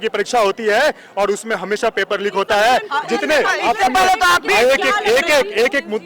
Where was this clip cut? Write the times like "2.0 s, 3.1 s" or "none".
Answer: none